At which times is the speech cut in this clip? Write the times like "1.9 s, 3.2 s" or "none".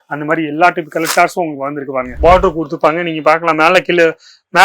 2.2 s